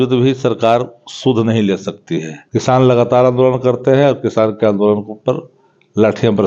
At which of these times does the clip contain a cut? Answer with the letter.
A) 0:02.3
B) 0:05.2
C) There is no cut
A